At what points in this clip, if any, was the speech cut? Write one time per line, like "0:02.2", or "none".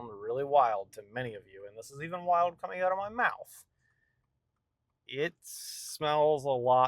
none